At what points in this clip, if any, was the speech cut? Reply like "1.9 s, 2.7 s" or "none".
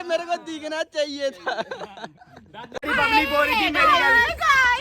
2.8 s